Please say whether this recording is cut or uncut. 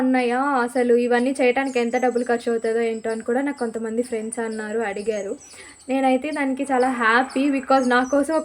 uncut